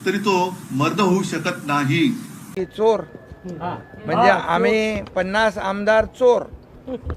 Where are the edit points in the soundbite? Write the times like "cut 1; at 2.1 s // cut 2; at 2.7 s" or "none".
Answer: cut 1; at 2.5 s